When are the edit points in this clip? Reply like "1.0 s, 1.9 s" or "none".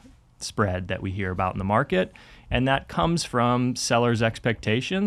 none